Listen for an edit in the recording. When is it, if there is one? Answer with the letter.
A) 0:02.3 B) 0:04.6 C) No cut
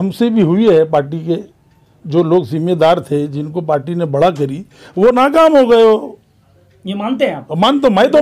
C